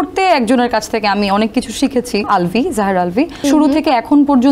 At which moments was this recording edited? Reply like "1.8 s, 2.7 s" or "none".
2.2 s, 3.4 s